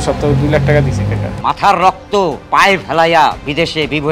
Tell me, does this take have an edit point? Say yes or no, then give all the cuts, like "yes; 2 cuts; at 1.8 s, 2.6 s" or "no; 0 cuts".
yes; 2 cuts; at 1.3 s, 2.4 s